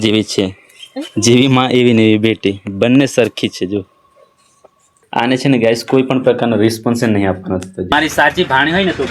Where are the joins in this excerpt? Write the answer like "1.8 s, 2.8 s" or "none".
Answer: 5.0 s, 7.9 s